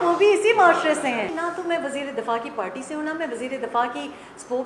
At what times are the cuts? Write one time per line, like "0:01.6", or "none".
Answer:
0:01.3